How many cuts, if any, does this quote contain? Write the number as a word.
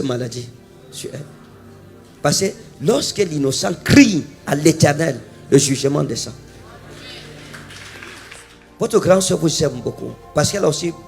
one